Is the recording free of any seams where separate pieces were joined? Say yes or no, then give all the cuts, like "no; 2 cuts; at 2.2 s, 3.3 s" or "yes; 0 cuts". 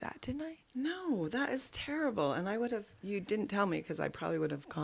yes; 0 cuts